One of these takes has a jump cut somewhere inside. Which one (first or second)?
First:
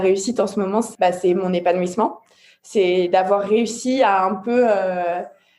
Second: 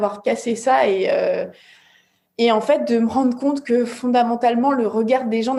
first